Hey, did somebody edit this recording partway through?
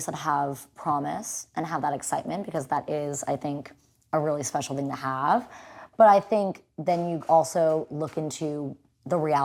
no; 0 cuts

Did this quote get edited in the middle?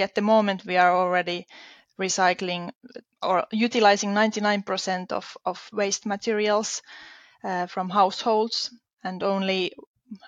no; 0 cuts

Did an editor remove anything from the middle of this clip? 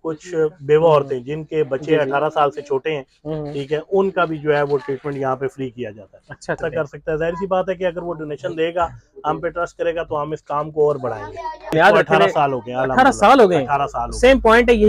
yes; 2 cuts; at 6.6 s, 11.6 s

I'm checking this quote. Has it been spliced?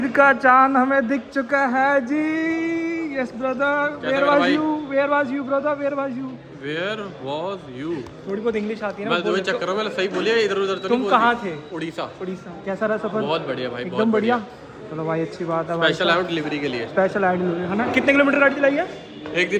no; 0 cuts

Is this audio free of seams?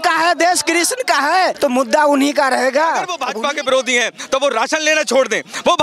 no; 2 cuts; at 1.5 s, 3.2 s

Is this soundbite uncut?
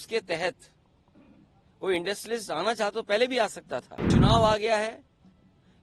no; 1 cut; at 4.1 s

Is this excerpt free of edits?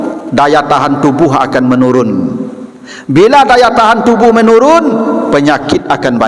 yes; 0 cuts

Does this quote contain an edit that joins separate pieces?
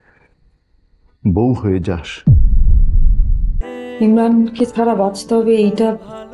yes; 1 cut; at 3.6 s

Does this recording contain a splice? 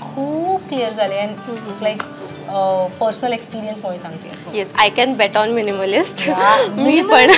no; 0 cuts

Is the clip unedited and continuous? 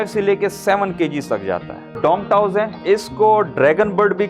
no; 2 cuts; at 1.9 s, 2.8 s

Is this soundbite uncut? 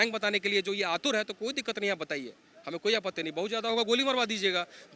yes; 0 cuts

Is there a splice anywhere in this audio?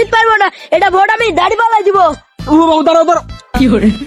no; 0 cuts

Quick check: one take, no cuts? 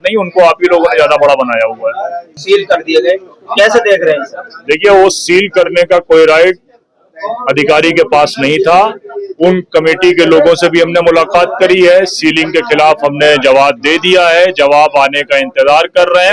yes; 0 cuts

